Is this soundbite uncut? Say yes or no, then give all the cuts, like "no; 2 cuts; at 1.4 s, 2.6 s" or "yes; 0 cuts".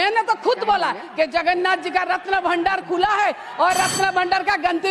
yes; 0 cuts